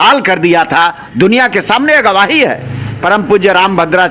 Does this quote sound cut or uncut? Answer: cut